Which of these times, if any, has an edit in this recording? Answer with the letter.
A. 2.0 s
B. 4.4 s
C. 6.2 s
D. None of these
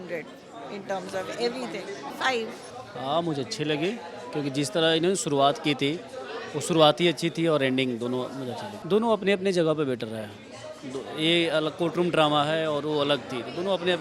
D